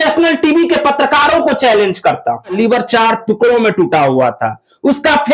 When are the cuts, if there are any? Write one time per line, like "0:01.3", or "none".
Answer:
0:02.6

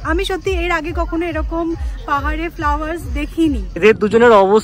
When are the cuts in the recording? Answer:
0:03.7

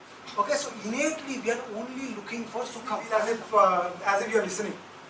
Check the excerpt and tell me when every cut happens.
0:03.0

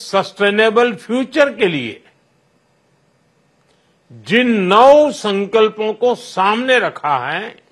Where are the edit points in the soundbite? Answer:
none

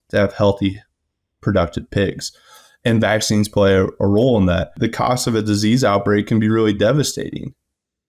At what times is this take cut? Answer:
0:04.8

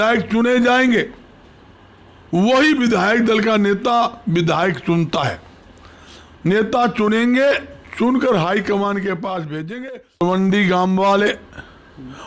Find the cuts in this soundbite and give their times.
0:10.2

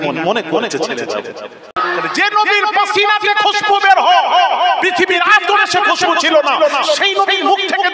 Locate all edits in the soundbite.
0:01.8

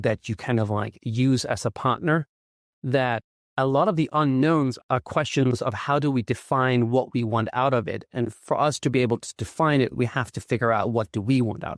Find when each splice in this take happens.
0:04.8

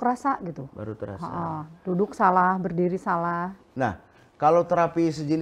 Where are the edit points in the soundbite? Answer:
0:03.6

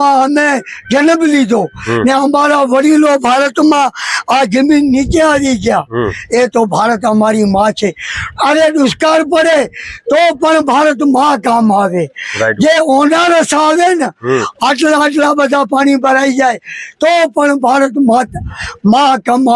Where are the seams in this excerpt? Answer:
none

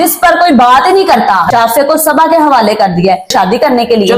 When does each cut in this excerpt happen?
0:01.5
0:03.3

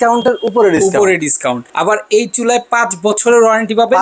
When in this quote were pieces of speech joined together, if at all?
0:01.7

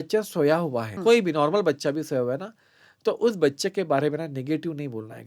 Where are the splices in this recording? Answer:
0:00.9

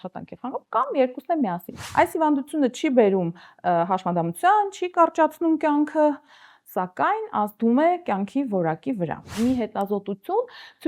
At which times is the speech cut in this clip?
0:01.7
0:09.3

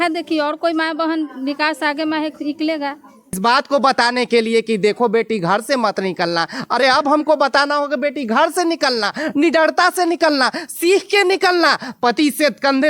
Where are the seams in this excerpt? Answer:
0:03.4

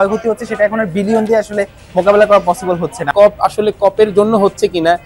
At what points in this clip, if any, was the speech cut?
0:03.1

